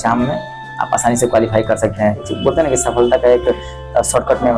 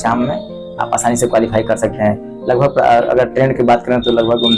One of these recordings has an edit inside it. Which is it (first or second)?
first